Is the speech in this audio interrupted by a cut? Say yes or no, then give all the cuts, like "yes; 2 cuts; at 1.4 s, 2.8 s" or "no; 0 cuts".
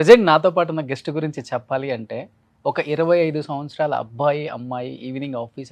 no; 0 cuts